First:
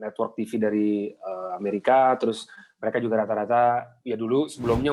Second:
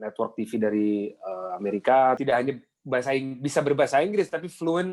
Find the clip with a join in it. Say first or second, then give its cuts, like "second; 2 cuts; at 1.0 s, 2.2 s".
second; 1 cut; at 2.2 s